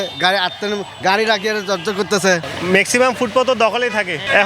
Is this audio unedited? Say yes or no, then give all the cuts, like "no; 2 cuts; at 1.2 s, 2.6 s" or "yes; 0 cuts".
no; 1 cut; at 2.4 s